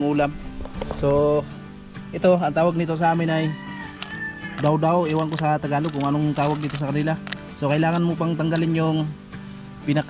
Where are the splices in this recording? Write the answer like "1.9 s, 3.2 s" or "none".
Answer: none